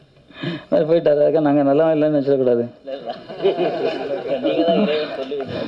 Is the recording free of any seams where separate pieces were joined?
yes; 0 cuts

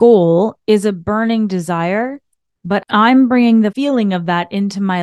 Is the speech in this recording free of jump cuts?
no; 2 cuts; at 2.9 s, 3.7 s

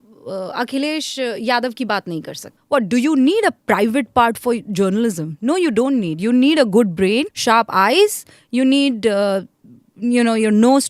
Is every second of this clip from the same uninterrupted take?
no; 2 cuts; at 2.5 s, 7.3 s

